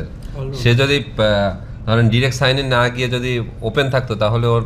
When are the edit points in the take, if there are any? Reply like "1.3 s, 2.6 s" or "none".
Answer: none